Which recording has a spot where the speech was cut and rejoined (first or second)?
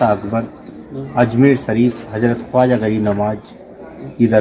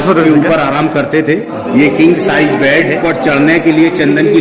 second